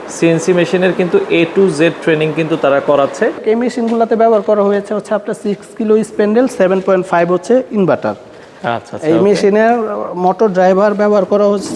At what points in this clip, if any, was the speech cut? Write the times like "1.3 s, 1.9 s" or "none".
3.4 s